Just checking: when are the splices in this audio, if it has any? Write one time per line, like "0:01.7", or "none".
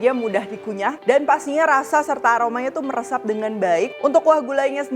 0:01.0
0:03.9